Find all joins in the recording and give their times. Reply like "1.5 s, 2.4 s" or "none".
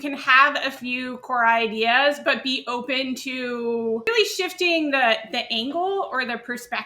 4.1 s